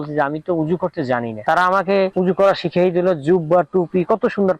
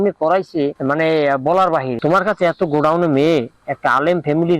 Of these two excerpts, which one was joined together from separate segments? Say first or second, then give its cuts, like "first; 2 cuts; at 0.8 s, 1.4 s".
second; 1 cut; at 2.0 s